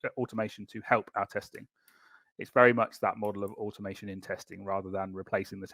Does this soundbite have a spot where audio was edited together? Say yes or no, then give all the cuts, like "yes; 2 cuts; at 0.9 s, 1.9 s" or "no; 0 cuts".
no; 0 cuts